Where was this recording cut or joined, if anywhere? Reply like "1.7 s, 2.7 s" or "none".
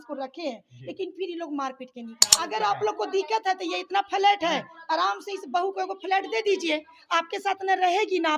2.4 s